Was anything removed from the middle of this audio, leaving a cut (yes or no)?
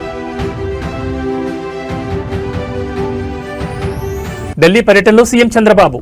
yes